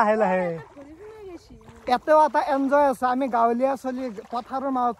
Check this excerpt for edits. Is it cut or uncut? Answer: uncut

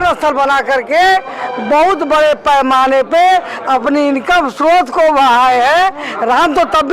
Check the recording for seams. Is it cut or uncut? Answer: uncut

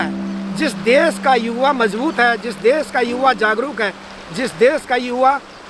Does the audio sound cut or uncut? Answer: uncut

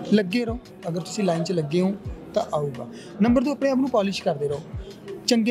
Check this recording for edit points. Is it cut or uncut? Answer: uncut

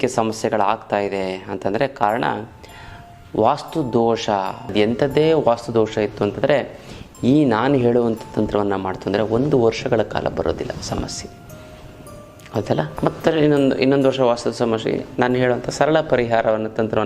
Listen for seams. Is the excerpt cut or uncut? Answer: cut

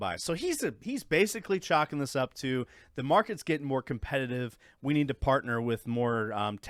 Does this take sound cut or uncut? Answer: uncut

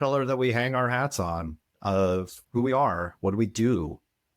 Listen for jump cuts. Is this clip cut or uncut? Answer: cut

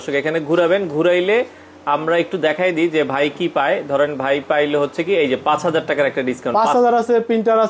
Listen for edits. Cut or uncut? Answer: uncut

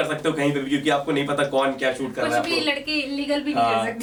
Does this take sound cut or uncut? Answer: uncut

